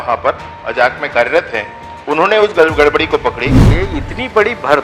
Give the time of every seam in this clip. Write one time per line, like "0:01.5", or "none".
0:03.7